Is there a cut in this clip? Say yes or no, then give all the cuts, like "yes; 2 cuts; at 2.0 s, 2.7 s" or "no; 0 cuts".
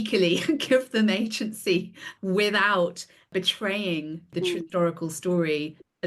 yes; 3 cuts; at 2.0 s, 3.3 s, 4.6 s